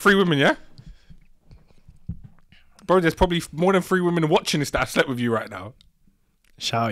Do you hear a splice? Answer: no; 0 cuts

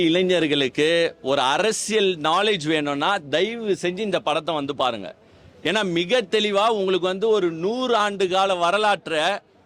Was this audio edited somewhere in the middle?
no; 0 cuts

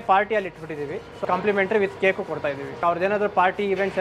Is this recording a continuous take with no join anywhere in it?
no; 2 cuts; at 1.2 s, 2.8 s

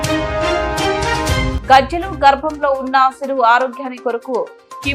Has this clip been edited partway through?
yes; 1 cut; at 1.5 s

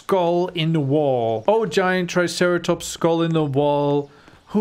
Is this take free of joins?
no; 1 cut; at 1.4 s

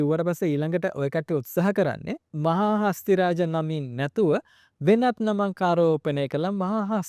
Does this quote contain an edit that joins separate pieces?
no; 0 cuts

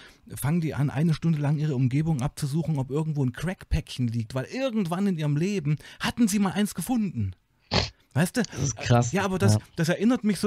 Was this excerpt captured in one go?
yes; 0 cuts

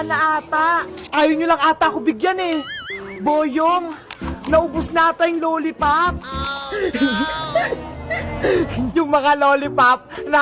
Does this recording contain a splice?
yes; 1 cut; at 8.9 s

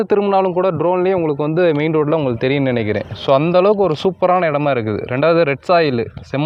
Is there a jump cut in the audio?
no; 0 cuts

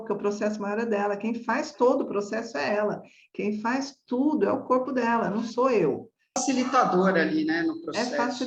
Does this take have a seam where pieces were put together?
yes; 1 cut; at 6.4 s

